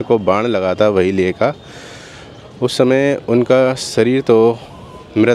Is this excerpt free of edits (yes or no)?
yes